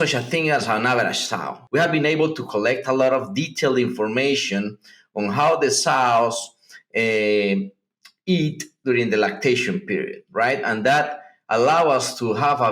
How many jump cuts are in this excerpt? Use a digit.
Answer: 1